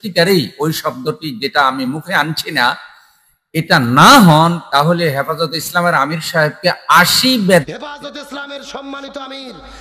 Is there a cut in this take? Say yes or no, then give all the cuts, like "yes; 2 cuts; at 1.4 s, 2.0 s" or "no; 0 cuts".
yes; 1 cut; at 7.7 s